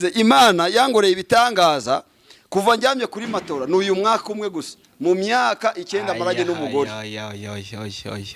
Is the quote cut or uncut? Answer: uncut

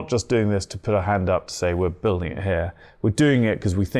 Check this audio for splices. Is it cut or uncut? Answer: uncut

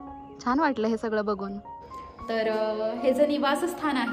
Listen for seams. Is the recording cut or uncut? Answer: cut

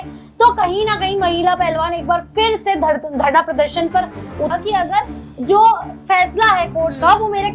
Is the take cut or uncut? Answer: cut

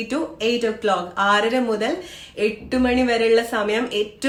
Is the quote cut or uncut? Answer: uncut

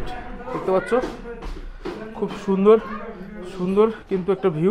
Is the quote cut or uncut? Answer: uncut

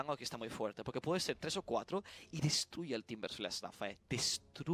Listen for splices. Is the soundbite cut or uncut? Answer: uncut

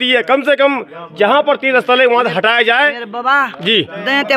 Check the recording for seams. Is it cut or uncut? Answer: uncut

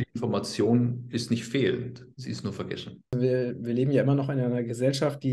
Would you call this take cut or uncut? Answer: cut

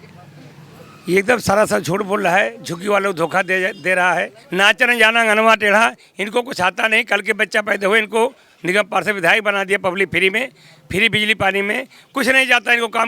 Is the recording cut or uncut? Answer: cut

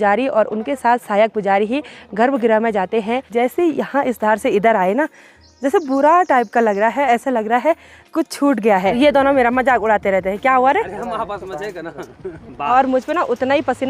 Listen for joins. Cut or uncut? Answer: cut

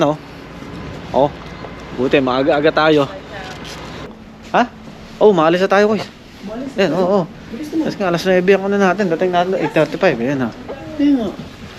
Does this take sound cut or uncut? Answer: cut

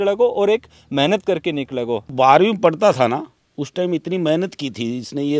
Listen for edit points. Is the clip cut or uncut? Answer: cut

